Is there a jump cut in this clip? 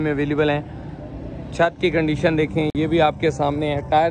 no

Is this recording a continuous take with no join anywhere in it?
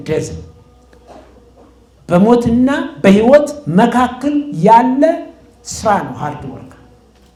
yes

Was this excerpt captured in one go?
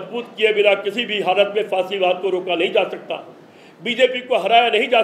yes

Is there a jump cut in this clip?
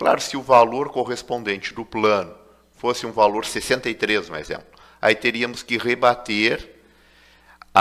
no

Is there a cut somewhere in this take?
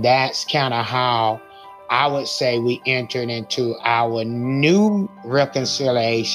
yes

